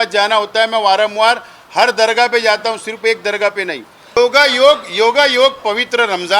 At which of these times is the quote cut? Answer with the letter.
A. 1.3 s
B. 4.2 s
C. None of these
B